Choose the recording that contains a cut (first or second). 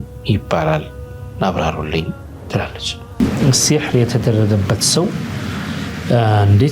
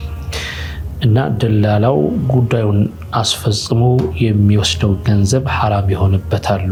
first